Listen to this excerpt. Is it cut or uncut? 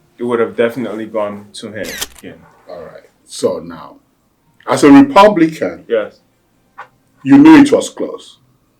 cut